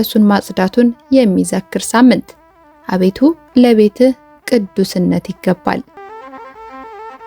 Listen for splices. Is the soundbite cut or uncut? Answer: cut